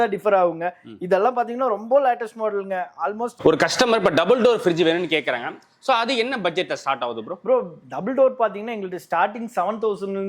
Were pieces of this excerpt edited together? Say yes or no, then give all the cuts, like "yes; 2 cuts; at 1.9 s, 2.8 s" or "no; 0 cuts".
yes; 1 cut; at 3.3 s